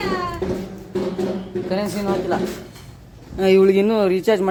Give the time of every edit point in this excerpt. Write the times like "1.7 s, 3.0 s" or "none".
none